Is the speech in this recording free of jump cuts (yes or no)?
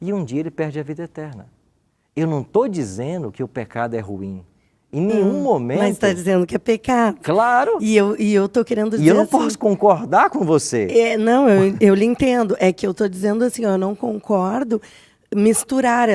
yes